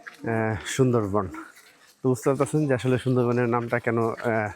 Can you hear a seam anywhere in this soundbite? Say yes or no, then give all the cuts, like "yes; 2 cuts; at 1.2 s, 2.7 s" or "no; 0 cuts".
no; 0 cuts